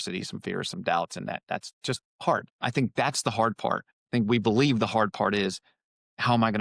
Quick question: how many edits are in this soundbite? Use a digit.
2